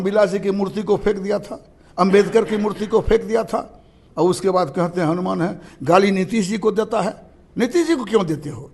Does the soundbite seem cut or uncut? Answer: uncut